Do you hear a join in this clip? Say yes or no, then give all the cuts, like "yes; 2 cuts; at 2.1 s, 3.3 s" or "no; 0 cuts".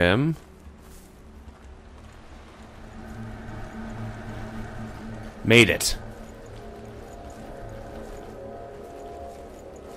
yes; 1 cut; at 1.9 s